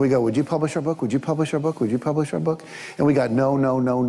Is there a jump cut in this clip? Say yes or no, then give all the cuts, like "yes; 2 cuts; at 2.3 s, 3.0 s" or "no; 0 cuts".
no; 0 cuts